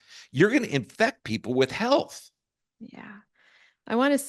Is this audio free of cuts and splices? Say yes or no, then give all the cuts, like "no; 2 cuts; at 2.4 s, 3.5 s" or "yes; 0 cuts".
yes; 0 cuts